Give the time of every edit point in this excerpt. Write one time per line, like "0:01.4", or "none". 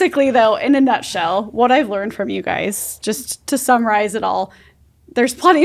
none